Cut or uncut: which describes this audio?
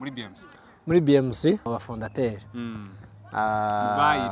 cut